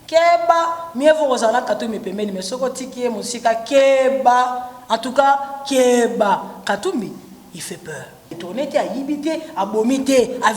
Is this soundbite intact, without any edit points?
no; 1 cut; at 8.4 s

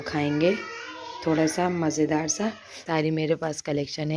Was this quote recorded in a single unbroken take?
no; 1 cut; at 2.8 s

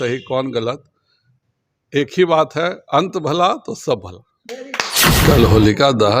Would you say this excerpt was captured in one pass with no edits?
no; 1 cut; at 5.0 s

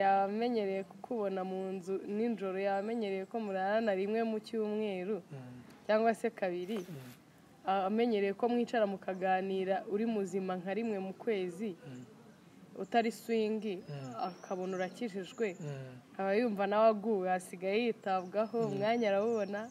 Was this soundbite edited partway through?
no; 0 cuts

